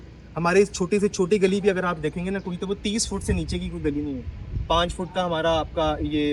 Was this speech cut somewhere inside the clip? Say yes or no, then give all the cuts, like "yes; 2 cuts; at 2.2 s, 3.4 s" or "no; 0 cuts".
no; 0 cuts